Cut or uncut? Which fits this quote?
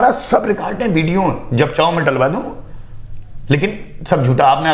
uncut